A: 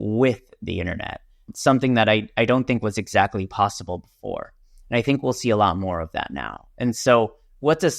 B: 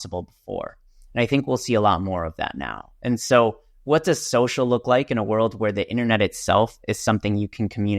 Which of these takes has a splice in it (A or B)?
A